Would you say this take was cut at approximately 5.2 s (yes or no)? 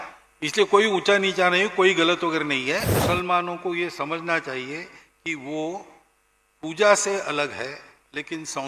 no